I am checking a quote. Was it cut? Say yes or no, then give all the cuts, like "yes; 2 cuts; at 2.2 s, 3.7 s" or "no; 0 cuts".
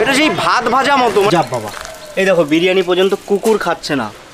yes; 1 cut; at 1.3 s